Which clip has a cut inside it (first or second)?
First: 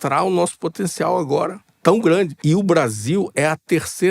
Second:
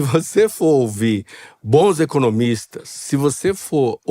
first